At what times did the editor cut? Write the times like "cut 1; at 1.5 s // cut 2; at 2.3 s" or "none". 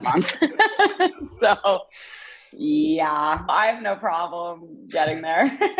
cut 1; at 3.5 s